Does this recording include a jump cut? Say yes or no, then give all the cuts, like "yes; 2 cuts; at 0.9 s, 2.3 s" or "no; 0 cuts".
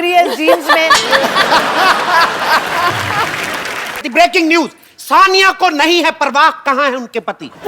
yes; 1 cut; at 4.1 s